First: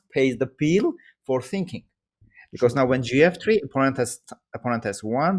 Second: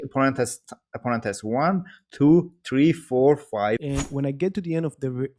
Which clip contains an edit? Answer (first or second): second